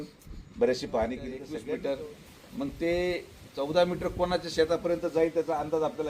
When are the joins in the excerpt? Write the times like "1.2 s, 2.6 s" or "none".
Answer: 1.5 s